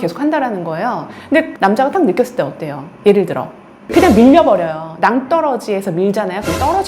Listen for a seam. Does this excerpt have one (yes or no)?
no